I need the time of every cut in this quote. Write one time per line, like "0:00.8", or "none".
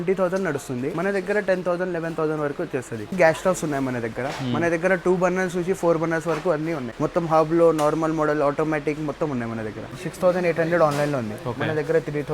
0:00.9
0:03.1
0:06.9
0:10.0